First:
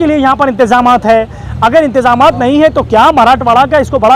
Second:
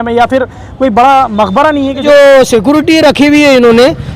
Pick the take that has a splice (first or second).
second